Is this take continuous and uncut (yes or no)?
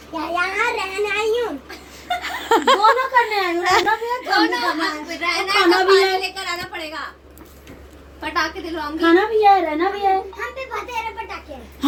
yes